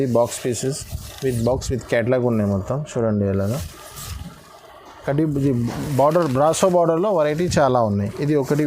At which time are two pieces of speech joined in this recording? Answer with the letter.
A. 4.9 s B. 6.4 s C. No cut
A